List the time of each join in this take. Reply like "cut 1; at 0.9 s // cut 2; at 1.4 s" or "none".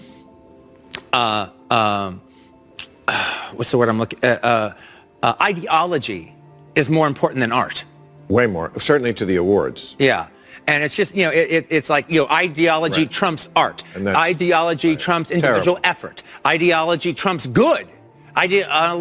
none